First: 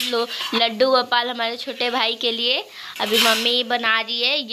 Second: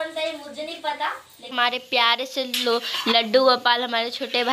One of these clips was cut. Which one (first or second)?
second